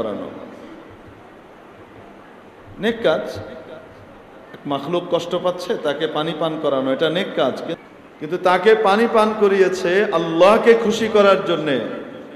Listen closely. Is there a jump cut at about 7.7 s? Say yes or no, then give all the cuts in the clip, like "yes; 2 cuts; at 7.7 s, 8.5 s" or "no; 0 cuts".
yes; 1 cut; at 7.7 s